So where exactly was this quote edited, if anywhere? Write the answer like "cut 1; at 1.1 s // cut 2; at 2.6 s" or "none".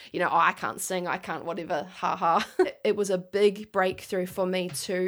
cut 1; at 2.8 s